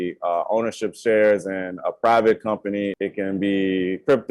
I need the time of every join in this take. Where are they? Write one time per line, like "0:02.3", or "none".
0:02.9